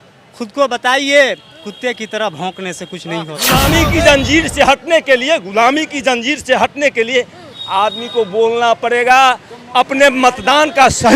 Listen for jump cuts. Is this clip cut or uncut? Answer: cut